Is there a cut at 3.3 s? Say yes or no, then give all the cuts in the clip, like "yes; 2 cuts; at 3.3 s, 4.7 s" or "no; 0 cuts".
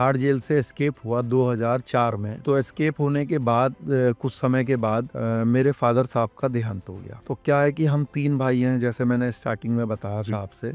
no; 0 cuts